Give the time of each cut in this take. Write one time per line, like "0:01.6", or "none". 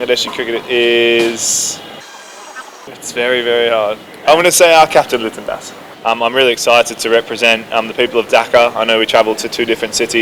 0:02.5
0:05.9